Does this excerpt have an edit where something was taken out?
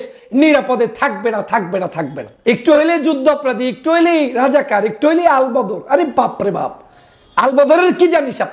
yes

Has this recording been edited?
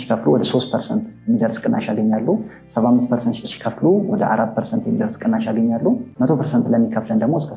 yes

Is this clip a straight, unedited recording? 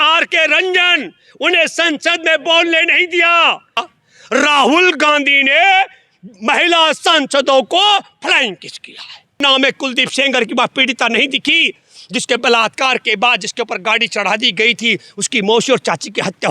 no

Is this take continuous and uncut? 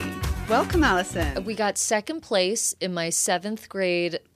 yes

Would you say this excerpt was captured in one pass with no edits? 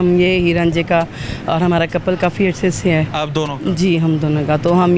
yes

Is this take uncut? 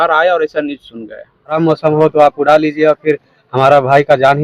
no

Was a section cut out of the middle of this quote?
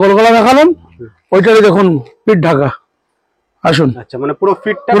no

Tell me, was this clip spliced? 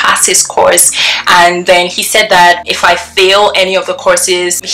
no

